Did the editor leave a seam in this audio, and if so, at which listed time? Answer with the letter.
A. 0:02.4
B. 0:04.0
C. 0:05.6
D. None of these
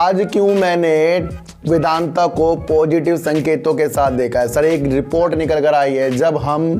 D